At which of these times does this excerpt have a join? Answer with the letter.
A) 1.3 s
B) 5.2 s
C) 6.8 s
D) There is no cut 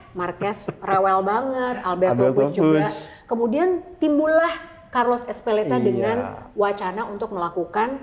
D